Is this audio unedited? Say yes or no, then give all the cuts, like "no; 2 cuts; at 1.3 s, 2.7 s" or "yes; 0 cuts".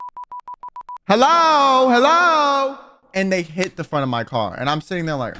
no; 2 cuts; at 1.0 s, 3.0 s